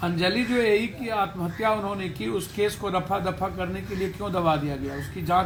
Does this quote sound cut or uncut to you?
uncut